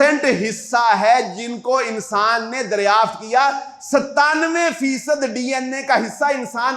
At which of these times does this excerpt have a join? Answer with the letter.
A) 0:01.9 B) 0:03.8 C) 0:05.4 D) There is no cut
D